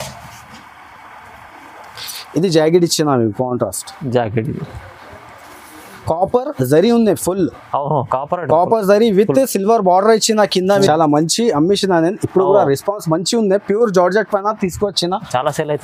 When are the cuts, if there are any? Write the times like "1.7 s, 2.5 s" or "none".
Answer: 10.9 s